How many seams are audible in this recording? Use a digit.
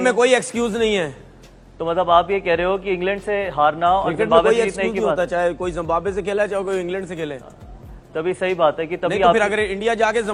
0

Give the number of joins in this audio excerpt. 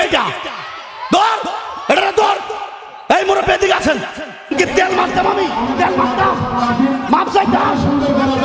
1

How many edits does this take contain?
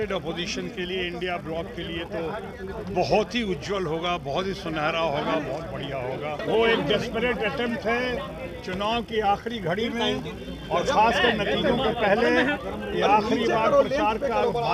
1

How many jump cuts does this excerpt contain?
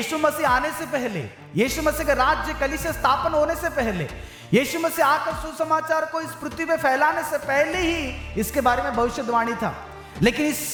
0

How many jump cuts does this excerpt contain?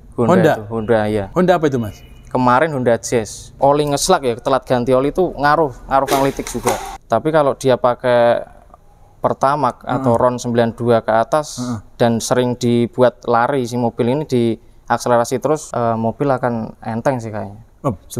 4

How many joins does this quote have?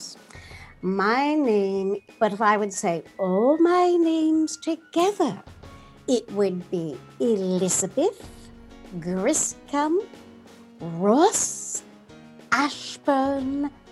1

